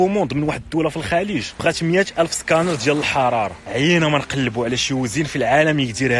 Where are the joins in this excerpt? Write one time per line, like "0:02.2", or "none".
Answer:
0:01.5
0:03.6

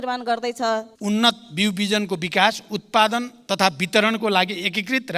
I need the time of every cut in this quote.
0:00.9

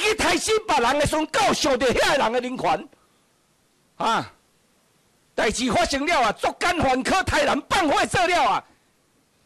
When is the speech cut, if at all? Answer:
none

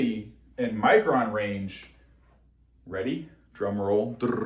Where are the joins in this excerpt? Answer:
none

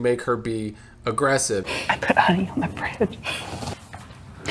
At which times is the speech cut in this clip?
0:01.7

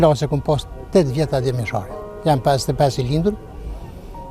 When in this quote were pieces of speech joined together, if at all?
none

